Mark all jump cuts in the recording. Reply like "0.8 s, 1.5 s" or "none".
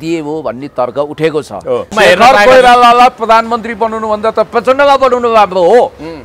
1.9 s